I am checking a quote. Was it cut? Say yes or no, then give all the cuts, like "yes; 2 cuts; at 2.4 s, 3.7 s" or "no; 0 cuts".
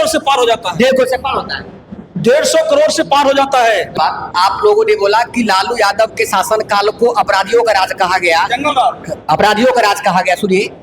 yes; 1 cut; at 3.9 s